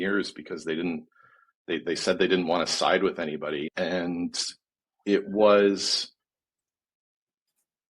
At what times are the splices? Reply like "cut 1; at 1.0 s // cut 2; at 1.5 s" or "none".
cut 1; at 3.7 s